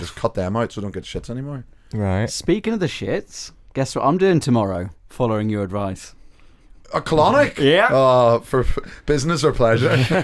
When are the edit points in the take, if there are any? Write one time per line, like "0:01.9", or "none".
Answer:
none